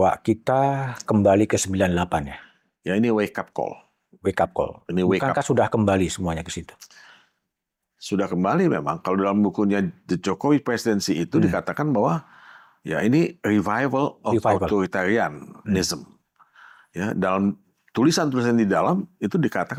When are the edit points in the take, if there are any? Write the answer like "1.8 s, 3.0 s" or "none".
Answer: none